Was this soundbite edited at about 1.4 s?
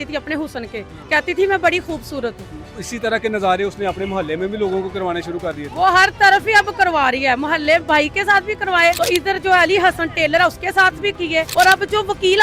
no; 3 cuts; at 2.7 s, 9.0 s, 11.2 s

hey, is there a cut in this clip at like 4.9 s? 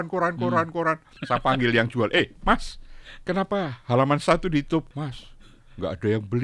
yes; 2 cuts; at 1.1 s, 4.9 s

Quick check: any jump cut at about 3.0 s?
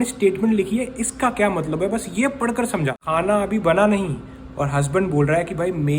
yes; 1 cut; at 3.0 s

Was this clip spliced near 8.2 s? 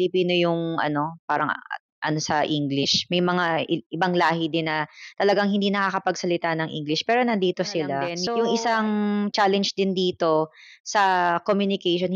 yes; 1 cut; at 8.2 s

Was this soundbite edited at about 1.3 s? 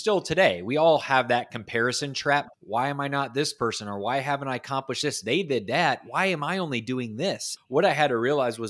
no; 2 cuts; at 2.6 s, 7.5 s

